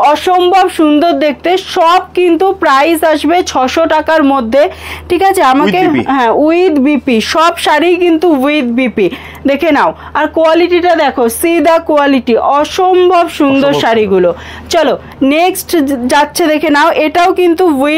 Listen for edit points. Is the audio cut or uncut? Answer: uncut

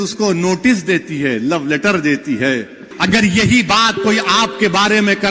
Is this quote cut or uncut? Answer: cut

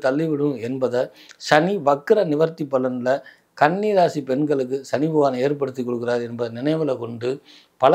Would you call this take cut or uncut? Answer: uncut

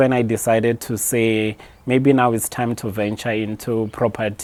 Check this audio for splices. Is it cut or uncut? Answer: uncut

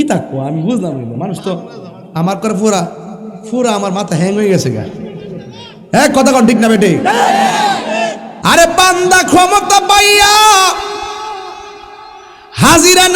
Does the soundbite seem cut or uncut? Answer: cut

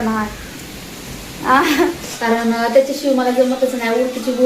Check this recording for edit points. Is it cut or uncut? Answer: cut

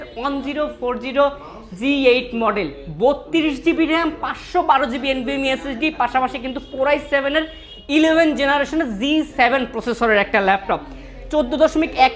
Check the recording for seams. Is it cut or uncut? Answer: uncut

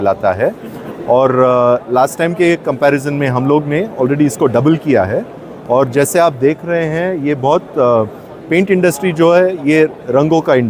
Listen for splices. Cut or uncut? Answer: uncut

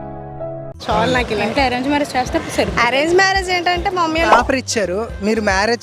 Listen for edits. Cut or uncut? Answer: cut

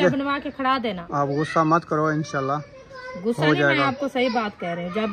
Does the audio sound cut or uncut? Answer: cut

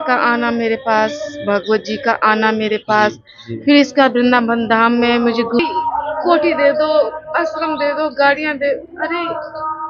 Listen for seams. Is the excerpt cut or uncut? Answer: cut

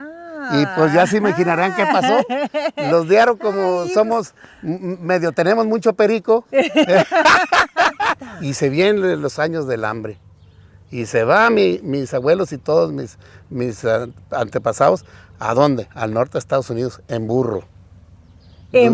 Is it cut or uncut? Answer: cut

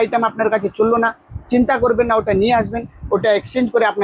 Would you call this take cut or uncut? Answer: uncut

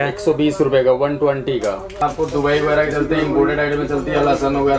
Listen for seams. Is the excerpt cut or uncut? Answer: cut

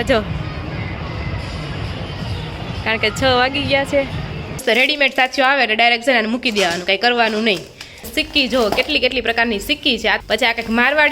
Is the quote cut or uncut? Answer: cut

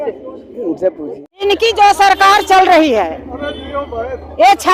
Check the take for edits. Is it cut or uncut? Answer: cut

